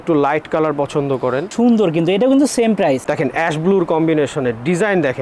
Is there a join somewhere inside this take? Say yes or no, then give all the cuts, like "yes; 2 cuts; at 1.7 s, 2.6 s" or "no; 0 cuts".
yes; 2 cuts; at 1.5 s, 3.1 s